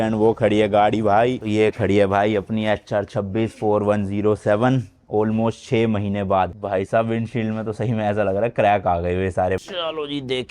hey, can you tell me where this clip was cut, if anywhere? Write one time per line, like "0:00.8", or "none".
0:06.6
0:09.6